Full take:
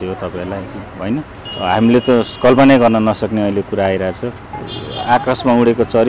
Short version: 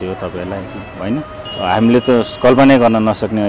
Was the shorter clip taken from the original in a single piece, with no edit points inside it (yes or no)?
yes